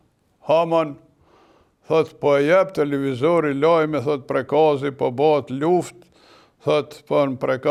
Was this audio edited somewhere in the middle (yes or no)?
no